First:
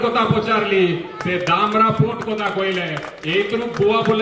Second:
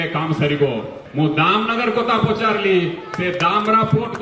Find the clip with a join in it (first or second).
second